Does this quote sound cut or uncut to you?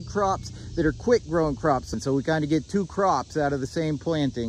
cut